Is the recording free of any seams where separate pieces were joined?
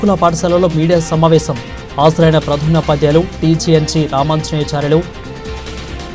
no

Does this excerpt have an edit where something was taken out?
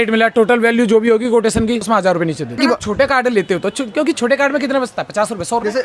no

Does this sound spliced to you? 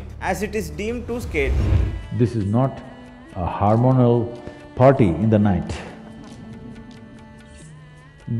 yes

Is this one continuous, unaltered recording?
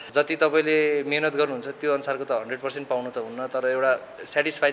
yes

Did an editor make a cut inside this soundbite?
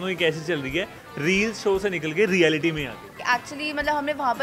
yes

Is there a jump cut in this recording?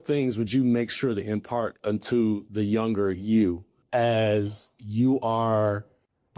no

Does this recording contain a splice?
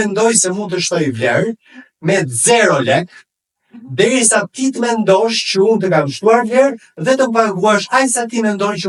no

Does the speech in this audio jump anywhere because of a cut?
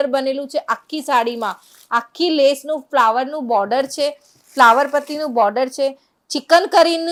no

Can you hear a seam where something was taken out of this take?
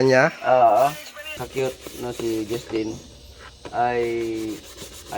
yes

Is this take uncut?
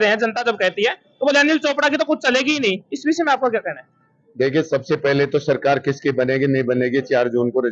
yes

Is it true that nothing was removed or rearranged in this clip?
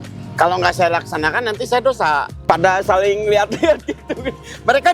no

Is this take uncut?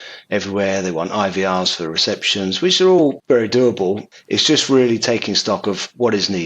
no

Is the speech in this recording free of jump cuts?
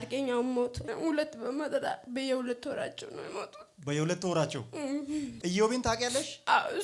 no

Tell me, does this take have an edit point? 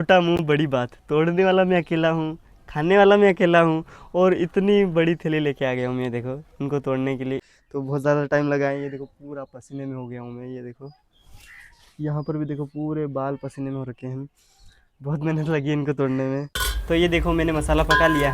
yes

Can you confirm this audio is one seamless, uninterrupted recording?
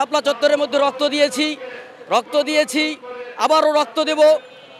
yes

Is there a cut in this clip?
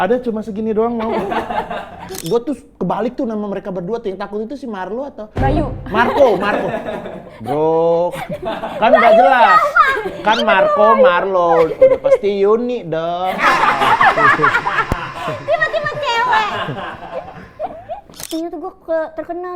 yes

